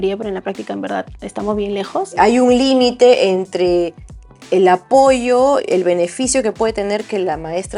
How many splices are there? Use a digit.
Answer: 1